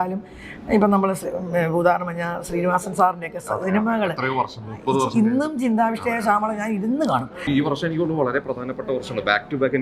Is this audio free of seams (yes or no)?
no